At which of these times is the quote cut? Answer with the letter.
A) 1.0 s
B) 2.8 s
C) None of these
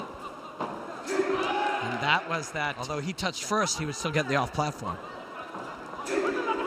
B